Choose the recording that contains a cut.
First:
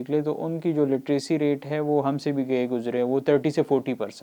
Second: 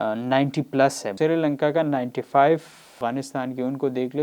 second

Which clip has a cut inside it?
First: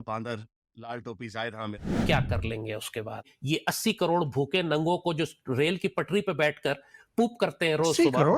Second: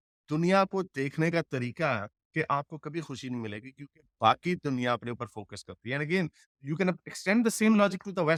first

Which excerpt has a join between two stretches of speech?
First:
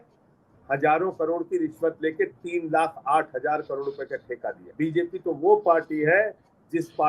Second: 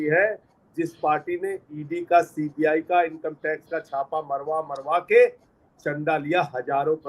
first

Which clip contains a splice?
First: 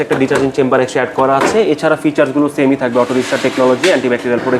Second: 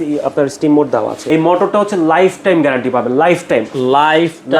second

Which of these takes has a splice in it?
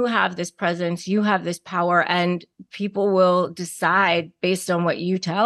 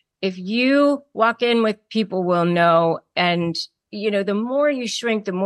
second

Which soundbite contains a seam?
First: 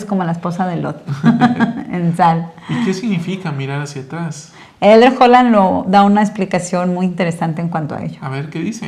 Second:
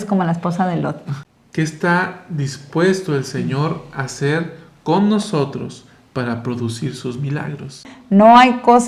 second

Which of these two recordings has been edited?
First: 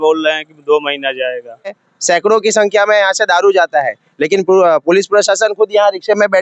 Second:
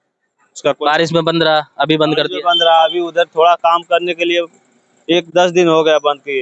first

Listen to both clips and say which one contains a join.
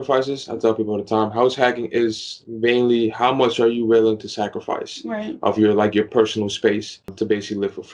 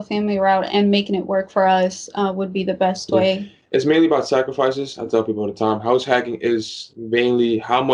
first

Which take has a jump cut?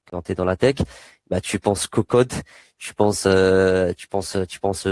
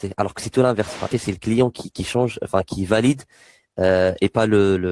second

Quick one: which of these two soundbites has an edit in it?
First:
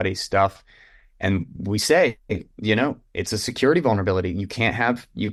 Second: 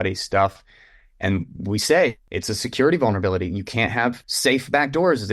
second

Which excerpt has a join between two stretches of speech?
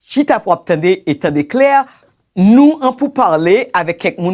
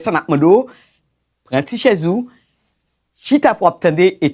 first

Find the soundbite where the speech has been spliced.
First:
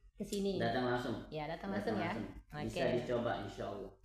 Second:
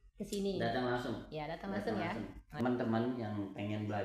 second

